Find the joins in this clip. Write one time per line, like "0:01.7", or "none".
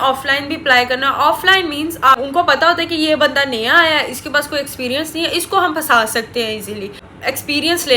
0:02.2
0:07.1